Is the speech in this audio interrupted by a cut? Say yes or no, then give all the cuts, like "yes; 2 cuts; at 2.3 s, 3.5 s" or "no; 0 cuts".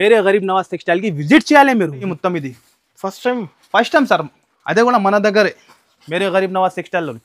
yes; 1 cut; at 2.1 s